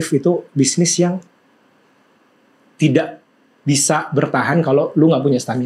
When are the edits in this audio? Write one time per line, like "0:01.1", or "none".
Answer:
none